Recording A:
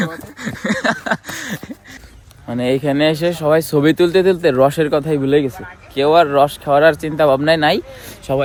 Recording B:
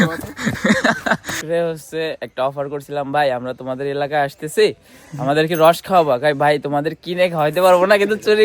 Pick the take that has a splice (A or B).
B